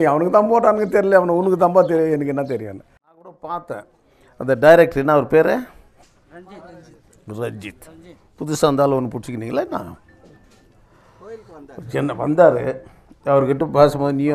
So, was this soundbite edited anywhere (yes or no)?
yes